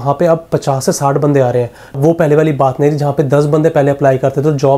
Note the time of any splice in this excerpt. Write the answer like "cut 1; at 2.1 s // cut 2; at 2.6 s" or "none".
cut 1; at 1.8 s